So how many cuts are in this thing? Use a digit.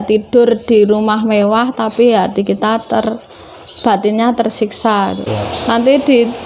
1